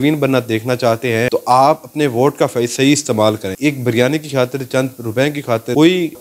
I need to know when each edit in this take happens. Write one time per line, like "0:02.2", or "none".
0:01.3
0:03.6